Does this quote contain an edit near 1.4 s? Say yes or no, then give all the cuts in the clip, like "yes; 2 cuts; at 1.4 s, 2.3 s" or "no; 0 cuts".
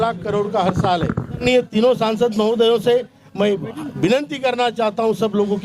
yes; 1 cut; at 1.4 s